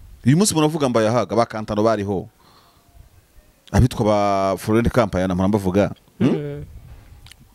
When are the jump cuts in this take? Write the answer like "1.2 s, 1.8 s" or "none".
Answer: none